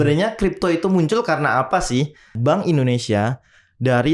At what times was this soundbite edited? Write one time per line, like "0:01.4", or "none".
0:02.3

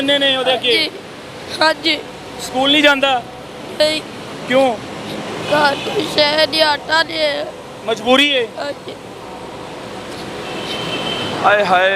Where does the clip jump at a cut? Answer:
none

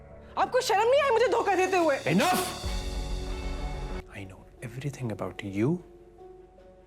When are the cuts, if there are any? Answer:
0:04.0

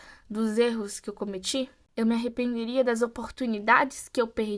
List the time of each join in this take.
none

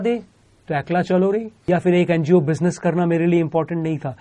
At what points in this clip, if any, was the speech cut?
0:01.5

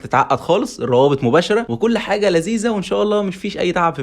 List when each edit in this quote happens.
0:01.7

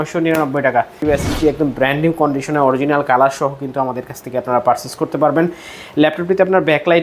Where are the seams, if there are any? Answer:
0:01.0

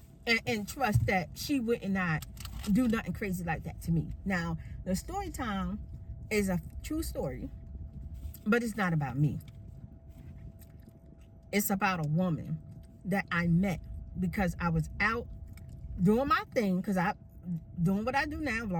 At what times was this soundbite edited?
none

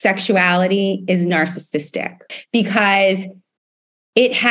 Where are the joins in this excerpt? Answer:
0:02.2

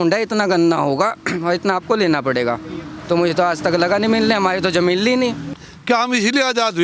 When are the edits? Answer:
0:05.5

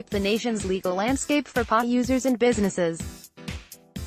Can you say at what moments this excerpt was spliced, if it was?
0:03.0

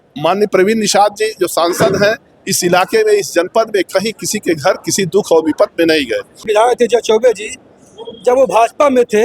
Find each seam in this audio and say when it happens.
0:06.5

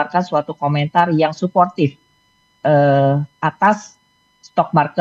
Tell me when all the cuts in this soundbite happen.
none

